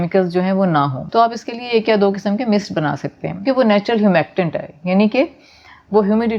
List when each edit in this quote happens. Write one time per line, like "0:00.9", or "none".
0:01.0
0:03.5

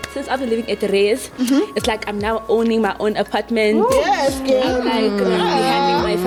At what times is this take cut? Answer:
none

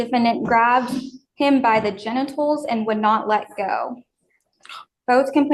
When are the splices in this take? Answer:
0:02.0

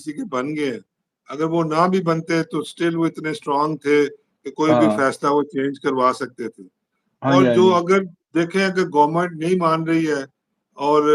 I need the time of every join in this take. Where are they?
none

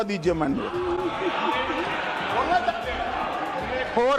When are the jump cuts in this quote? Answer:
none

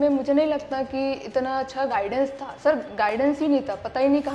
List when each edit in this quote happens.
none

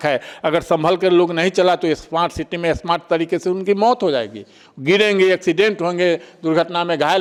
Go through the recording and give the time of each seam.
none

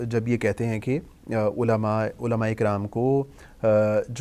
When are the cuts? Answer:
none

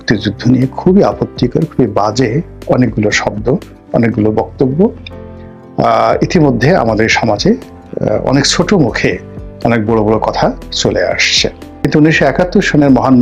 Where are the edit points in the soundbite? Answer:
0:11.7

